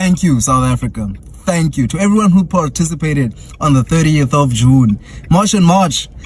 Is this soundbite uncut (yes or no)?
yes